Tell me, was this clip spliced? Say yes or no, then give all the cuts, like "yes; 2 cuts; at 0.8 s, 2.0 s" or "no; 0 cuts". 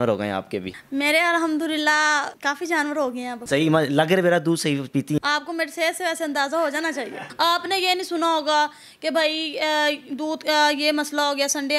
yes; 1 cut; at 7.2 s